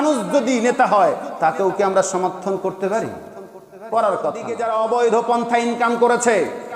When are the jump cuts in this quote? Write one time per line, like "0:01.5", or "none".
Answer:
0:04.6